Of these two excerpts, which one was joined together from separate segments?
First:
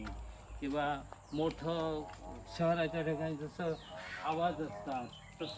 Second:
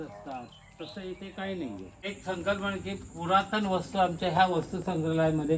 second; 1 cut; at 1.9 s

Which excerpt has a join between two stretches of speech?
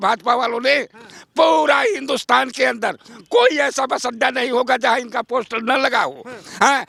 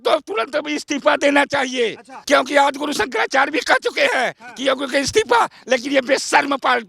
second; 1 cut; at 2.1 s

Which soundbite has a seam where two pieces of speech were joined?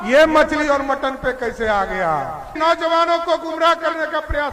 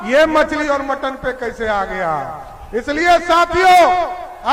first; 1 cut; at 2.6 s

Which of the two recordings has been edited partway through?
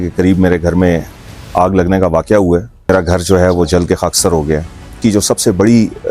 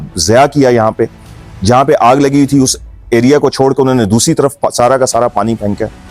first; 2 cuts; at 2.9 s, 5.0 s

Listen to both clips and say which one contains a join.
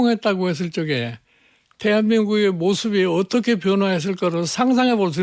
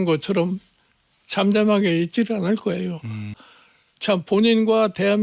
second; 1 cut; at 3.3 s

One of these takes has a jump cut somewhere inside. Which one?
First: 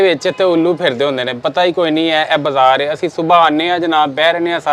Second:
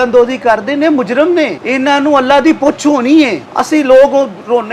second; 2 cuts; at 1.6 s, 3.5 s

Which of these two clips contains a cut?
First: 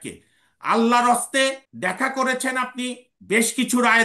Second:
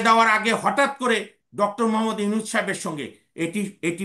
first; 2 cuts; at 1.7 s, 3.1 s

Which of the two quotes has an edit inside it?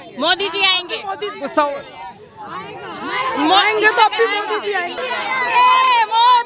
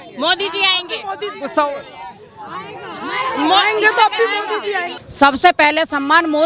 second; 1 cut; at 5.0 s

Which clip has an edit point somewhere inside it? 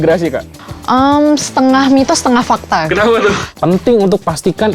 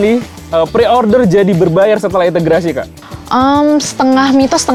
first; 1 cut; at 3.5 s

